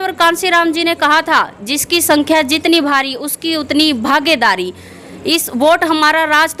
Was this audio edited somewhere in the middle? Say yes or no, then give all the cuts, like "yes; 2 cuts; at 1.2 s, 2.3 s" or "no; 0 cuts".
no; 0 cuts